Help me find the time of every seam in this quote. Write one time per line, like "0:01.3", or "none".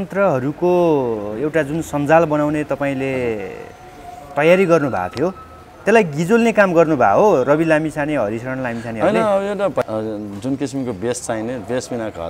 0:09.8